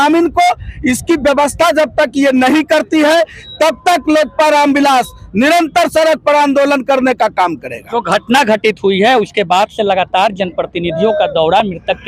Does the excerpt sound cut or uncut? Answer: uncut